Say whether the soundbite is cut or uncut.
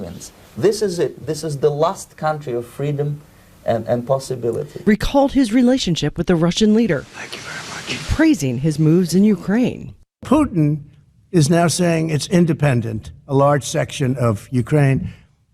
cut